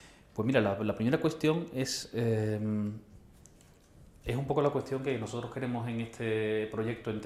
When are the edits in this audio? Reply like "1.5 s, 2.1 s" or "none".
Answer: 4.6 s